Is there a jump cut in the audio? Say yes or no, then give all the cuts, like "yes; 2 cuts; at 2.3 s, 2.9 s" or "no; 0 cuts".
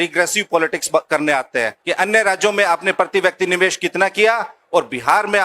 yes; 1 cut; at 1.8 s